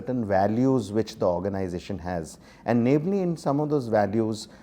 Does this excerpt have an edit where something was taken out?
no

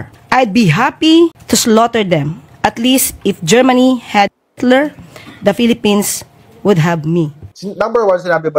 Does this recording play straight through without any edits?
no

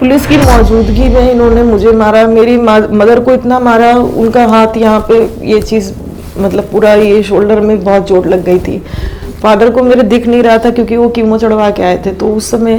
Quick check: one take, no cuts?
yes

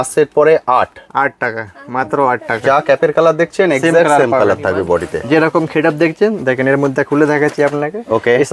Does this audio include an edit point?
yes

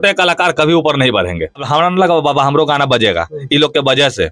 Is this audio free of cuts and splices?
no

